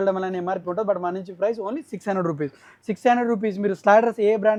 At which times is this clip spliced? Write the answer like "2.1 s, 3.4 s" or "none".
none